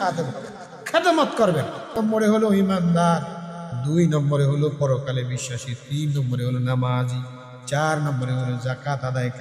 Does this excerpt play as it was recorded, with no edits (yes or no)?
no